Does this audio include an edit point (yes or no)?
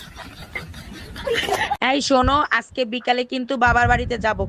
yes